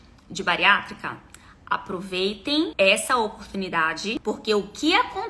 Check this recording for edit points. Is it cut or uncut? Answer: cut